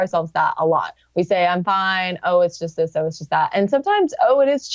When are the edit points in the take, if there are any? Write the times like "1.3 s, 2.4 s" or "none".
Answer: 1.0 s